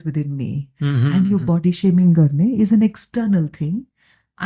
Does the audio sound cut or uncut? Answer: uncut